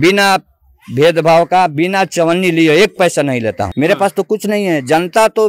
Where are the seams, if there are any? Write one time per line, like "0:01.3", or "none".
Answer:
0:03.7

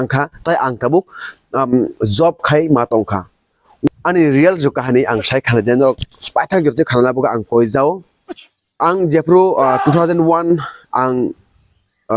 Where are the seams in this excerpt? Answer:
0:03.9

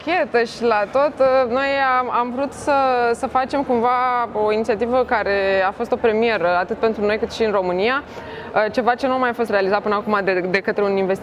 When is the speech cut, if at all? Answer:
none

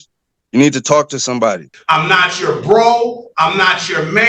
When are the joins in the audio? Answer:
0:01.7

